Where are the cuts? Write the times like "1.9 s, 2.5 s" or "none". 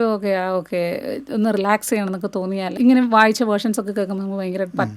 2.6 s